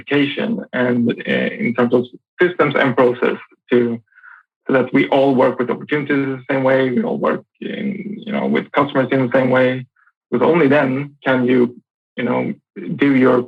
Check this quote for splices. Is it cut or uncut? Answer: uncut